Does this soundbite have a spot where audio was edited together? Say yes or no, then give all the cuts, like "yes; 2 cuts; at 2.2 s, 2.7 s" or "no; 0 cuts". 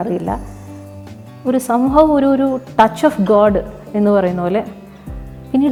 no; 0 cuts